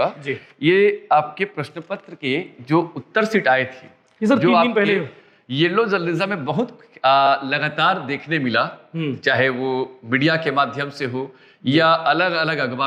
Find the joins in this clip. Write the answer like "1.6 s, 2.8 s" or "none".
none